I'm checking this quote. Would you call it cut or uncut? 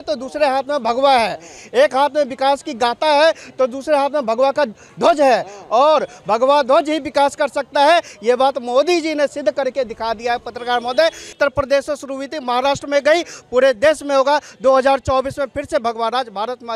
uncut